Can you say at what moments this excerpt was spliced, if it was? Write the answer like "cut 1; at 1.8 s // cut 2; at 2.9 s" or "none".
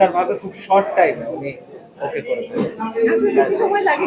none